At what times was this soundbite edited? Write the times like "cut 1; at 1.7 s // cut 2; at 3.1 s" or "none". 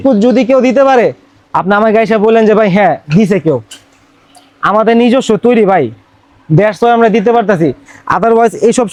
none

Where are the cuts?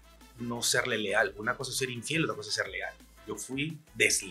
cut 1; at 2.9 s

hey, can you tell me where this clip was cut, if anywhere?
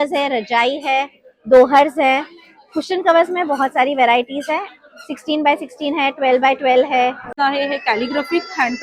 cut 1; at 7.3 s

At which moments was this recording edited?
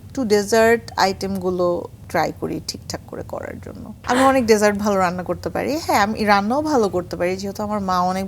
cut 1; at 2.0 s // cut 2; at 3.9 s

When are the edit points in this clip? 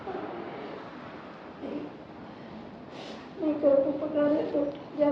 none

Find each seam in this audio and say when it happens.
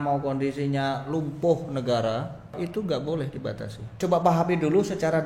cut 1; at 2.6 s // cut 2; at 4.0 s

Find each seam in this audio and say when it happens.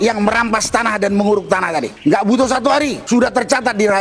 cut 1; at 1.9 s // cut 2; at 3.0 s

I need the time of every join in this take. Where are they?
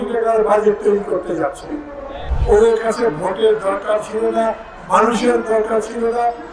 cut 1; at 2.3 s

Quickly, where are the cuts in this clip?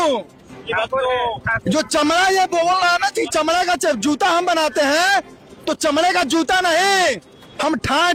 none

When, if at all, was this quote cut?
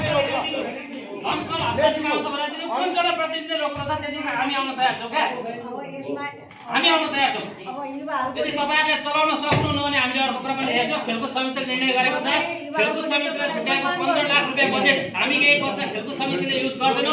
none

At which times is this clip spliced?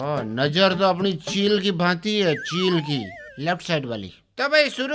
cut 1; at 3.2 s

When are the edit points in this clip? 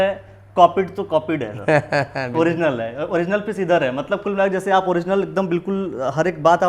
none

